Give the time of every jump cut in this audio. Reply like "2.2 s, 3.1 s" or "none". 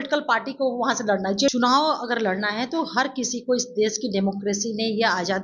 1.5 s